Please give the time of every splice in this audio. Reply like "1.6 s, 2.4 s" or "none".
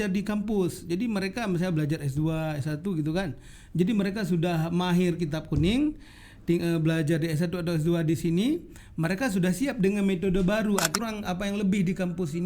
11.0 s